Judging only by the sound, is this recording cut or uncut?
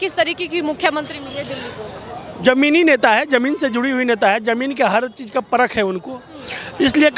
uncut